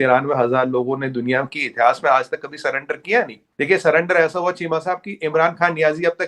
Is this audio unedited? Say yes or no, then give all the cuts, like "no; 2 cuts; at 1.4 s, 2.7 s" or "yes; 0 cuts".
no; 1 cut; at 3.4 s